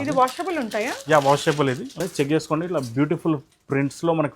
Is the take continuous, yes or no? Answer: no